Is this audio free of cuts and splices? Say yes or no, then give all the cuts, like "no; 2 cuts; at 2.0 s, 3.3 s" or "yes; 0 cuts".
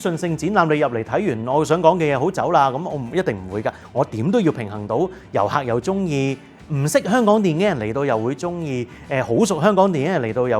yes; 0 cuts